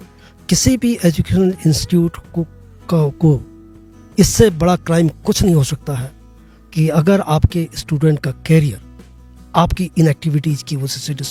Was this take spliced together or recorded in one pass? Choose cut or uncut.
uncut